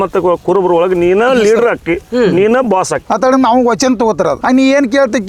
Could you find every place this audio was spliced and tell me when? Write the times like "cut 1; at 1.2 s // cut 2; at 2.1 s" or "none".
cut 1; at 3.0 s